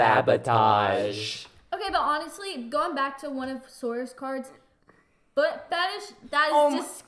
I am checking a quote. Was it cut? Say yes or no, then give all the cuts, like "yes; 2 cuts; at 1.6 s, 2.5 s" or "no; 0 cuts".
no; 0 cuts